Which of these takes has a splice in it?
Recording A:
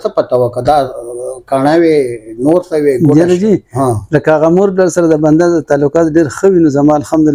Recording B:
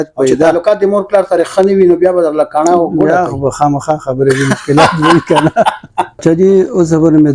B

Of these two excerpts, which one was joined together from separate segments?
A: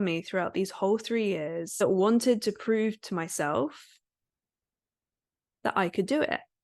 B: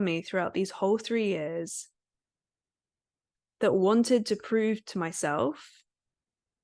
A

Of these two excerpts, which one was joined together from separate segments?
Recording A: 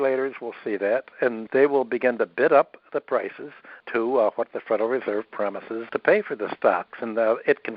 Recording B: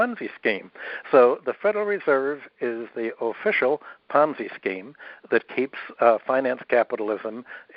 A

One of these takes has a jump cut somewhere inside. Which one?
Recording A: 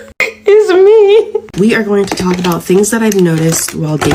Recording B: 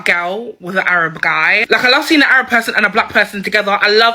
A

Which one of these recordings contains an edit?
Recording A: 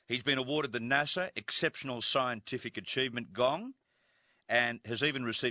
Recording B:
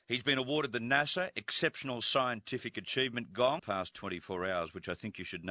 A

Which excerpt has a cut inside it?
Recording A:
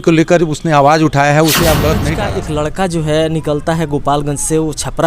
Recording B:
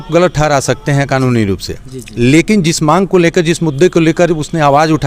A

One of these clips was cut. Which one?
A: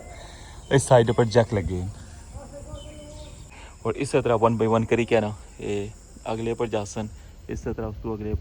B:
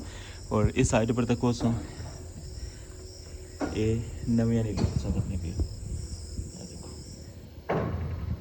A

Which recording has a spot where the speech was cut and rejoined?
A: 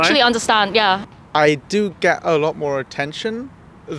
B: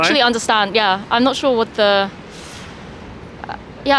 A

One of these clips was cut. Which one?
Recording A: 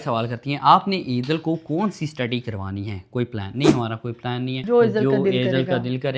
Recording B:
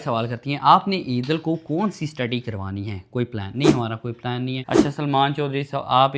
B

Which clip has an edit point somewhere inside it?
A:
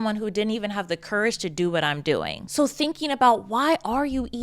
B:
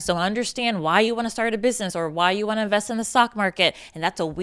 A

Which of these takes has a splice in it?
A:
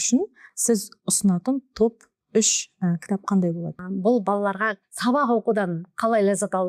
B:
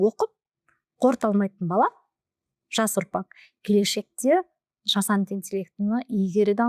A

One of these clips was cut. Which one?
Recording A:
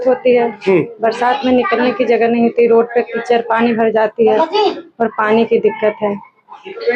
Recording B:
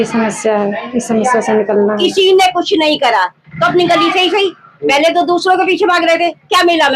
B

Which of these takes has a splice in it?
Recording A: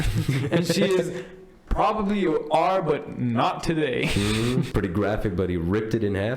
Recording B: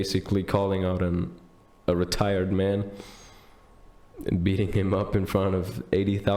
A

